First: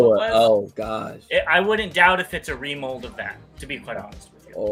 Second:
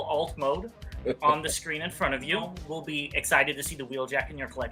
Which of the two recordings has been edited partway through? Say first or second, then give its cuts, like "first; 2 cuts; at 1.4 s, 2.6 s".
second; 1 cut; at 2.6 s